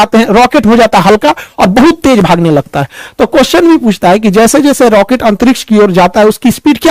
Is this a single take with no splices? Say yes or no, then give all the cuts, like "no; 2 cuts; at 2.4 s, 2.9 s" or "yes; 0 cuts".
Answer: yes; 0 cuts